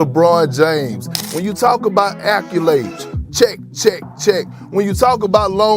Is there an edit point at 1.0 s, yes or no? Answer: yes